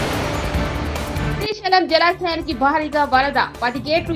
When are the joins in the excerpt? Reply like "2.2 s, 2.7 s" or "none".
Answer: none

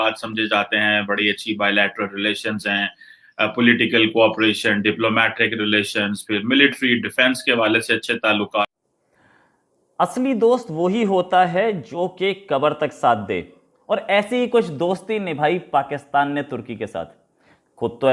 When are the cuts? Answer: 8.6 s

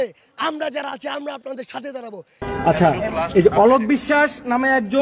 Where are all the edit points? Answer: 2.4 s

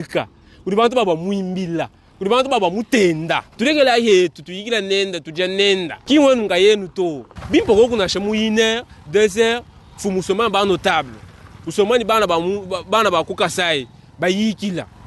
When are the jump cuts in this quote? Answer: 3.4 s, 5.9 s, 7.2 s

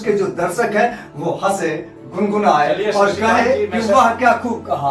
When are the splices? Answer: 3.8 s

